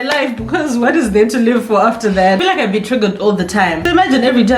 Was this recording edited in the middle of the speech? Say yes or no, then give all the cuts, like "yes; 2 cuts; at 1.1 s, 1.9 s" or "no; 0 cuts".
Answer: yes; 2 cuts; at 2.4 s, 3.8 s